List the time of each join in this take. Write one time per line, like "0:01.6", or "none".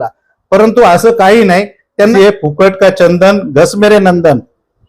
0:02.1